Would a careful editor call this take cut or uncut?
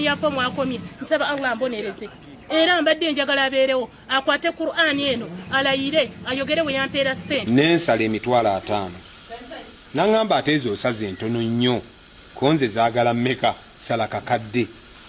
cut